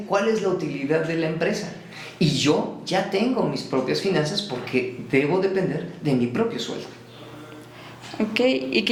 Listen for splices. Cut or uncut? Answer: uncut